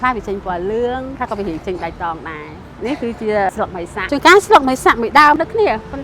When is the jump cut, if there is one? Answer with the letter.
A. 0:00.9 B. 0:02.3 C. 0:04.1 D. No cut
C